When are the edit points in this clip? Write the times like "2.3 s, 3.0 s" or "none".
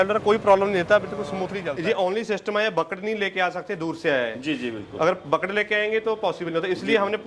1.4 s